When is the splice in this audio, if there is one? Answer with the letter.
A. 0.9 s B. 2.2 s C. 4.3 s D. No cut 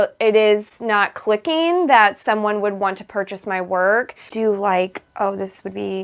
C